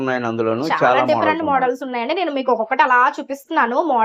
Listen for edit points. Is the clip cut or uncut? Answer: uncut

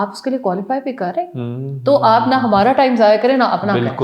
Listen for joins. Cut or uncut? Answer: uncut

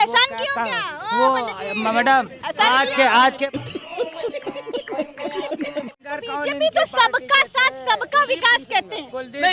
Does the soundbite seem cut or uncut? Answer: cut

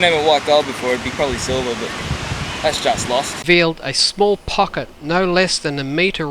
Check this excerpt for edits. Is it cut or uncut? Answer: cut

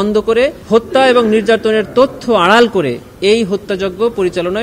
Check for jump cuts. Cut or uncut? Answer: uncut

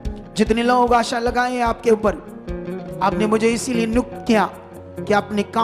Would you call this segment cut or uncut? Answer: cut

